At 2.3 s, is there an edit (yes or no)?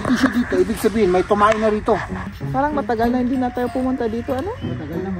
yes